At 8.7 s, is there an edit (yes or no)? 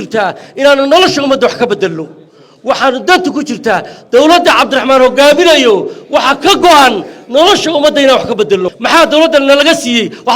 yes